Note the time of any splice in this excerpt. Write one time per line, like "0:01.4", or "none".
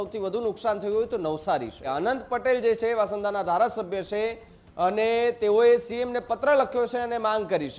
0:01.9